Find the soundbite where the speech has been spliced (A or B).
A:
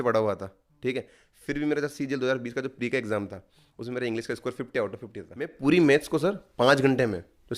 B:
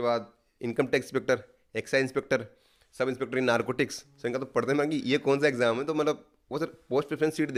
A